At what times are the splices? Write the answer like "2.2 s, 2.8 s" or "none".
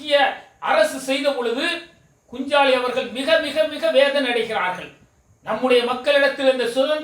none